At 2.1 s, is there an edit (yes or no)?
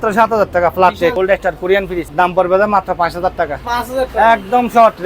yes